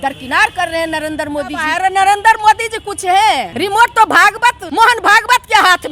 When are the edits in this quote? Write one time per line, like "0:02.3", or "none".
0:01.7
0:03.5
0:04.6